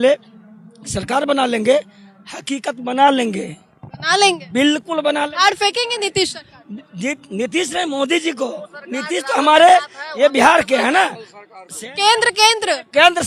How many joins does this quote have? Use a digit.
0